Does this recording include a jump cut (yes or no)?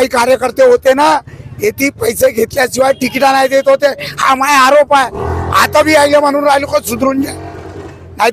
no